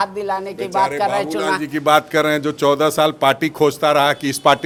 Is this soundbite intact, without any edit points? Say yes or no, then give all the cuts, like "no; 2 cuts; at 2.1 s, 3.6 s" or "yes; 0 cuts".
yes; 0 cuts